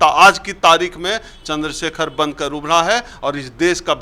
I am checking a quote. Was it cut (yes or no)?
no